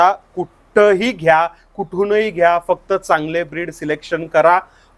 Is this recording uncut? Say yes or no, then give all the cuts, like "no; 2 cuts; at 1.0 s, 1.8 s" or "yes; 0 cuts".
yes; 0 cuts